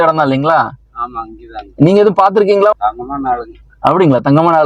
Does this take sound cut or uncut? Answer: cut